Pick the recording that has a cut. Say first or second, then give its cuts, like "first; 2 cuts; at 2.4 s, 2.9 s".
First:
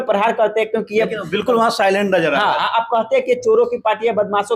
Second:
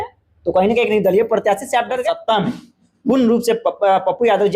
second; 1 cut; at 2.0 s